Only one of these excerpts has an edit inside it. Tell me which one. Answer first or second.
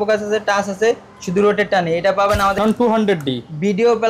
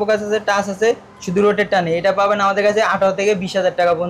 first